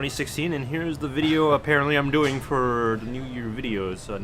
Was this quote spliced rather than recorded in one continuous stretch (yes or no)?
no